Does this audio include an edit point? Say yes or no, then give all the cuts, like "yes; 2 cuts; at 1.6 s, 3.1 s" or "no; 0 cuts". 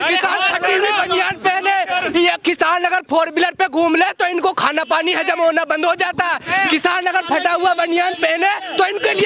no; 0 cuts